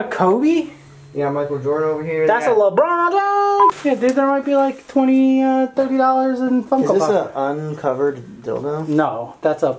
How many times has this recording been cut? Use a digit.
1